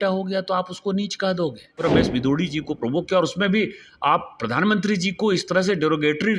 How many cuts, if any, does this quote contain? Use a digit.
1